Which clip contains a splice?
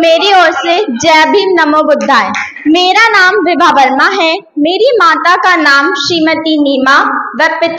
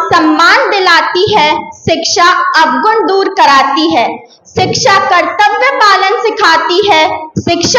first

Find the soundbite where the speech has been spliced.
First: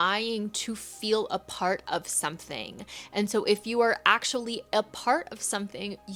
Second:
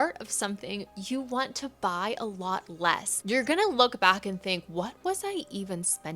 second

